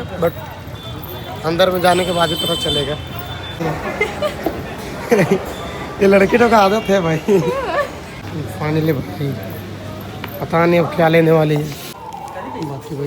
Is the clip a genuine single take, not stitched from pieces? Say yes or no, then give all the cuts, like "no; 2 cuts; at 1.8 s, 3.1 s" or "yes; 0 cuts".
no; 3 cuts; at 3.6 s, 8.2 s, 11.9 s